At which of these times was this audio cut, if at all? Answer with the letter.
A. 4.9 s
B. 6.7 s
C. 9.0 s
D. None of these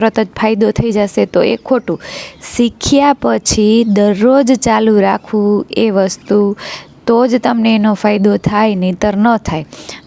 D